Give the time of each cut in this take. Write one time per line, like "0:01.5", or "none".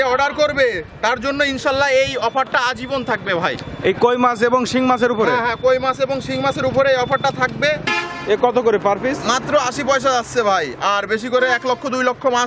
0:07.9